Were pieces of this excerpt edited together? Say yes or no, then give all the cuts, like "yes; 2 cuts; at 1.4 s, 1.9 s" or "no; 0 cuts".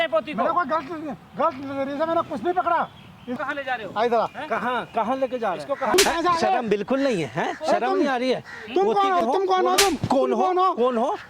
yes; 1 cut; at 3.4 s